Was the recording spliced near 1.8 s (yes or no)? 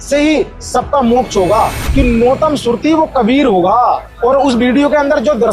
yes